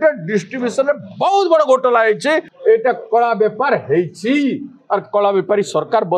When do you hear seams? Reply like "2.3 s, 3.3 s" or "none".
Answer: 2.5 s